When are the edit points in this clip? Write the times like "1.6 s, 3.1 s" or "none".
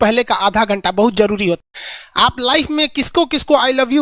1.6 s